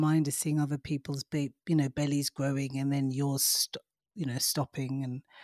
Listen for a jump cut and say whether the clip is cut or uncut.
uncut